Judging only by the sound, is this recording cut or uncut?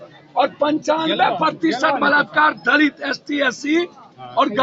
uncut